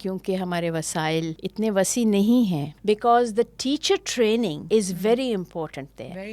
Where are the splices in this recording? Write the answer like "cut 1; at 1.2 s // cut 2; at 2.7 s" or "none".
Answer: cut 1; at 1.4 s // cut 2; at 2.7 s // cut 3; at 4.6 s

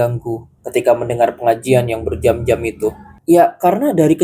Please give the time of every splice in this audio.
cut 1; at 3.1 s

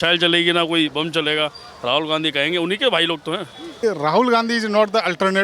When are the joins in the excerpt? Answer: cut 1; at 3.8 s

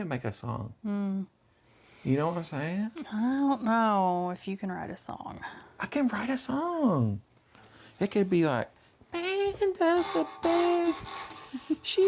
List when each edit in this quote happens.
none

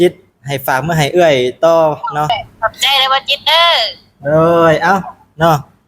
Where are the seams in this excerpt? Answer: cut 1; at 2.3 s

